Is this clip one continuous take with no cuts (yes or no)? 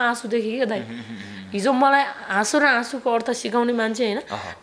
yes